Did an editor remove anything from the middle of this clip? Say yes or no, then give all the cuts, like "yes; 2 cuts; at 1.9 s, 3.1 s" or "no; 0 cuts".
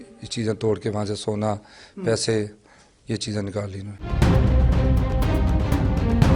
no; 0 cuts